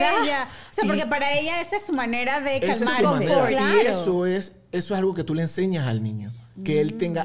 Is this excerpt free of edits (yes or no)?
yes